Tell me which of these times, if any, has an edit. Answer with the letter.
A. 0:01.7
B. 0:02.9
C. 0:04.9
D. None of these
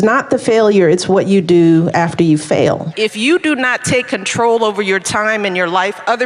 B